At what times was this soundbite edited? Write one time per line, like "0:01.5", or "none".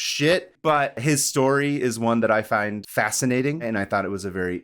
0:00.9
0:02.8
0:03.6